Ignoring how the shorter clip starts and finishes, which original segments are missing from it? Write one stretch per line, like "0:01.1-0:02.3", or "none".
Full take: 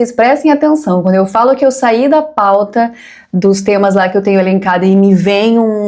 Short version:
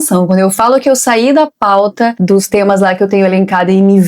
0:02.9-0:03.3

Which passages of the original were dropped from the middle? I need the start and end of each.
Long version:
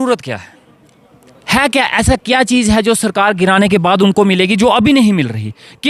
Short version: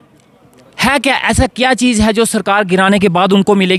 none

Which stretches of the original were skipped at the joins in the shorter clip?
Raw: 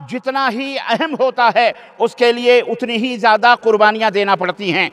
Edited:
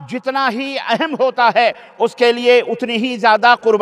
none

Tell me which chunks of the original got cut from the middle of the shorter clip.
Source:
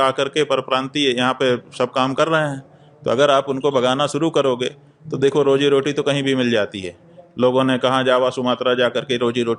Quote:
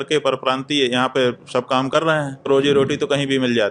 0:02.7-0:05.4

